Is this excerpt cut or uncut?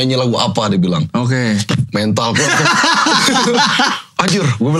uncut